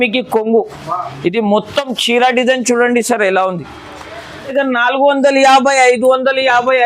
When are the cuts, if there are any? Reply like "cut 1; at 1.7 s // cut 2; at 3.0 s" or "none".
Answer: cut 1; at 4.3 s